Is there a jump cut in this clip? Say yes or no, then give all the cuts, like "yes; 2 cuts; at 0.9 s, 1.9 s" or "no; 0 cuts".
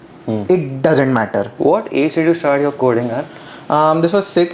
yes; 1 cut; at 1.5 s